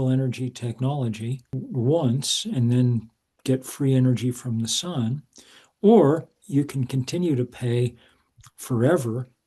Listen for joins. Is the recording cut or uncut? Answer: cut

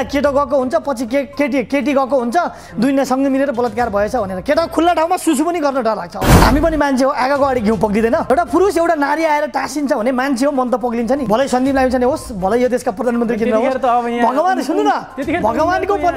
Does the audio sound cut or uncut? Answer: cut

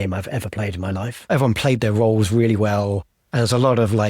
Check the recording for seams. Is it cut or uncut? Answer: cut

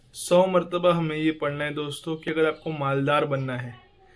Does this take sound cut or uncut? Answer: cut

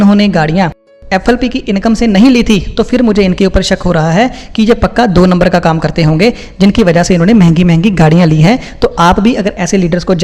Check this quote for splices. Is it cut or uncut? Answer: uncut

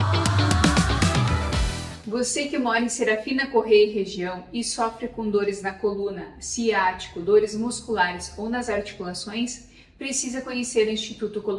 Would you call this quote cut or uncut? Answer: cut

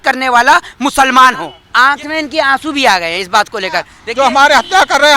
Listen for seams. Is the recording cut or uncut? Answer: cut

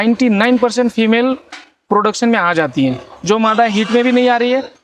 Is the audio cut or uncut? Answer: uncut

